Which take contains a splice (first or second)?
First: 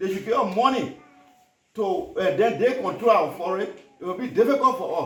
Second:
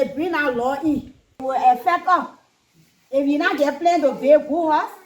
second